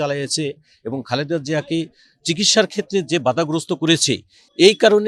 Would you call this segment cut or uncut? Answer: uncut